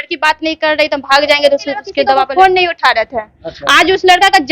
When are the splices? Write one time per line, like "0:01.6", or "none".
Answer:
0:02.0